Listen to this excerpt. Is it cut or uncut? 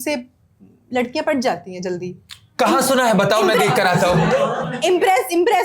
uncut